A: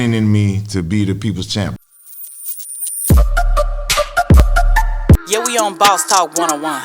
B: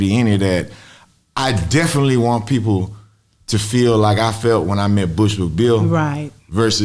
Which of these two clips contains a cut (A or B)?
A